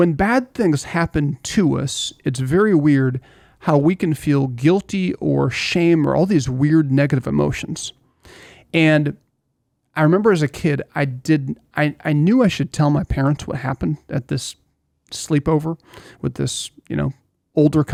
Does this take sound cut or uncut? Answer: uncut